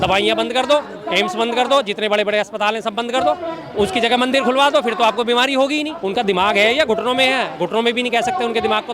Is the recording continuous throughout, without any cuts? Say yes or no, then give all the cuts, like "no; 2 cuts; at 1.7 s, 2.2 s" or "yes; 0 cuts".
no; 1 cut; at 6.0 s